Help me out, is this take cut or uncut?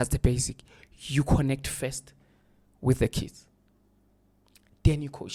uncut